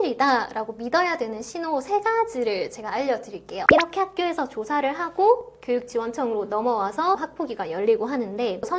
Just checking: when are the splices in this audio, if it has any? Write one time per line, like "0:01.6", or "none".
0:03.6